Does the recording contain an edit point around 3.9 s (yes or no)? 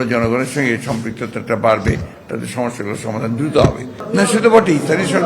yes